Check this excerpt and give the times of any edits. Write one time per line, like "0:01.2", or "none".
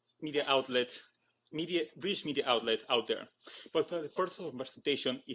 0:03.5